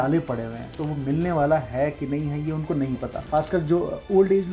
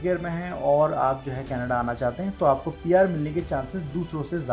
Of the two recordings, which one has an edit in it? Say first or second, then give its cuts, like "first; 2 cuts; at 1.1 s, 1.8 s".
first; 1 cut; at 3.2 s